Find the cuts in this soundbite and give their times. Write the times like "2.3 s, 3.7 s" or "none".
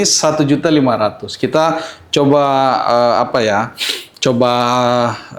none